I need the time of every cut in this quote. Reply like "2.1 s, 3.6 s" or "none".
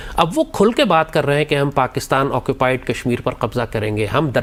none